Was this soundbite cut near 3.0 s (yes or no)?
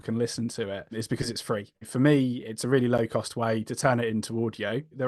no